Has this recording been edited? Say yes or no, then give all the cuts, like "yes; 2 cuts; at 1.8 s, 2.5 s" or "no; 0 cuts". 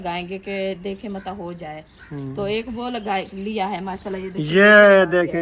no; 0 cuts